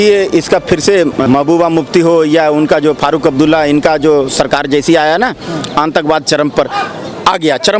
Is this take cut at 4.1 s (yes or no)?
no